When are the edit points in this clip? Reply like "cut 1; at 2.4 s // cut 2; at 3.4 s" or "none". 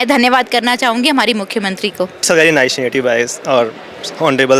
cut 1; at 2.2 s